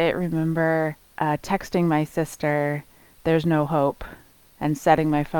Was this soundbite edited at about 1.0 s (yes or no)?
yes